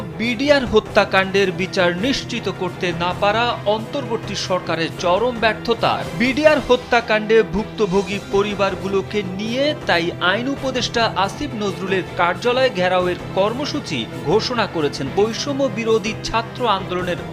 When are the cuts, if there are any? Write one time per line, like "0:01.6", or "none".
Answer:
0:06.1
0:15.1